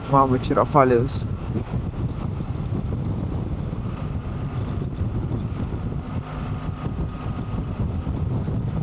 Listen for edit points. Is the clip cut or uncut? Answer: uncut